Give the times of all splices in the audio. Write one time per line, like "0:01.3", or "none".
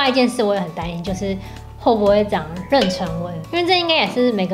0:03.5

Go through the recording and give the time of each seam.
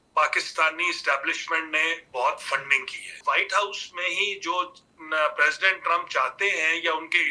0:03.2

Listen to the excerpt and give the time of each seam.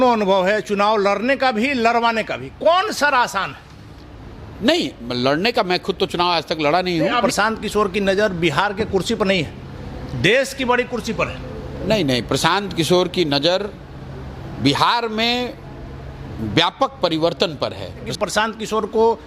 0:07.2
0:18.1

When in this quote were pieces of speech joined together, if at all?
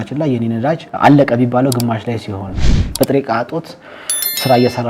0:00.9
0:02.8

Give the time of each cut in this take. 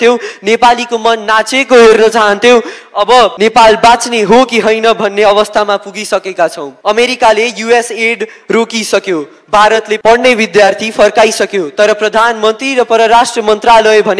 0:03.3
0:06.7
0:10.0

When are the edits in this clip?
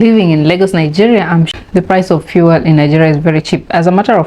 0:01.5

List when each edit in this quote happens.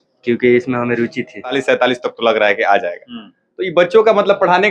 0:01.5

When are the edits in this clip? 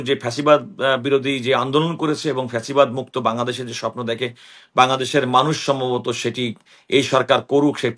none

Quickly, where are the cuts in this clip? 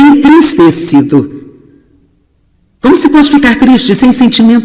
none

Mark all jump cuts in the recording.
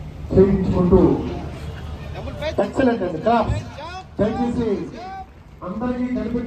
none

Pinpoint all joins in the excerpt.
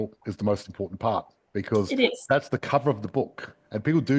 none

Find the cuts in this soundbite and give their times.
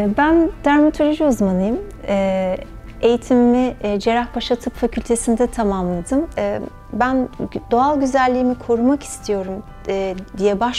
0:06.3

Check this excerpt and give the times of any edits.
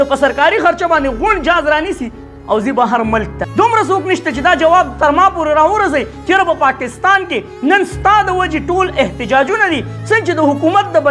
0:03.4

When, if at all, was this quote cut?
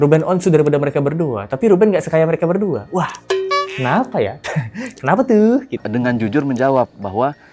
0:05.8

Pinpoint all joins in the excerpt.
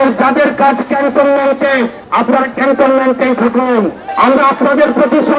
0:02.0
0:04.0

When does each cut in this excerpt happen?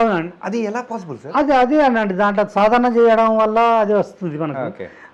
none

